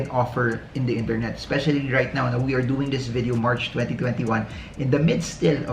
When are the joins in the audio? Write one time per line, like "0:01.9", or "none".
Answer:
none